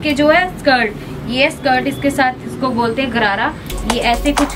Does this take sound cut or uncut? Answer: uncut